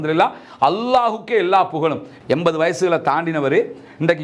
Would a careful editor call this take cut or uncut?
cut